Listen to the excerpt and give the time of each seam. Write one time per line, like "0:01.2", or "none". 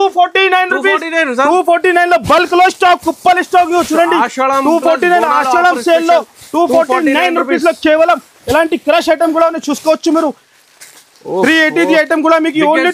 none